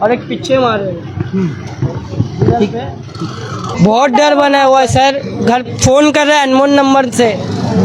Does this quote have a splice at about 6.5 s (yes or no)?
no